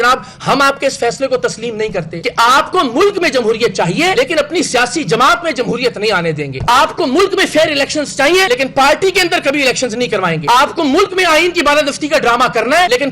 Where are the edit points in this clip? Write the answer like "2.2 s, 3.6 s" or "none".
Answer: 2.2 s